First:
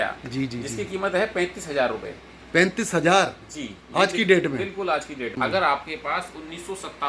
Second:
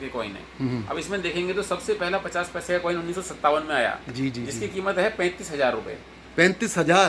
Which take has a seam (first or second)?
first